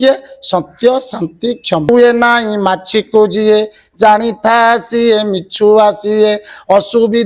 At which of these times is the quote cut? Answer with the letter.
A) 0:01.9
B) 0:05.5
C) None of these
A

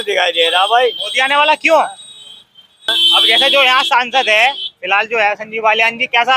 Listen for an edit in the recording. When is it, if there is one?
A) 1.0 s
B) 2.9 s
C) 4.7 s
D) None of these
B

